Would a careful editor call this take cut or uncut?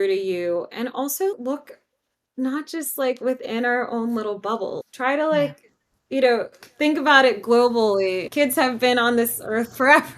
cut